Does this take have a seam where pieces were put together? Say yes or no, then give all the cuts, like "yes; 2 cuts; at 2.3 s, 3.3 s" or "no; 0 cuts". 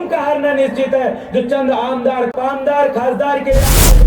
yes; 1 cut; at 2.3 s